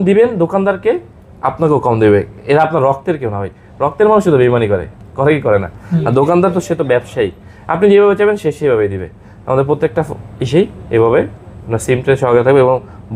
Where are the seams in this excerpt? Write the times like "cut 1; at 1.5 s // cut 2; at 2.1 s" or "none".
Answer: none